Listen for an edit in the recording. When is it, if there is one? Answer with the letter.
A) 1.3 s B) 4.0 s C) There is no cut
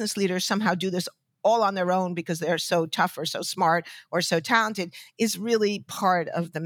C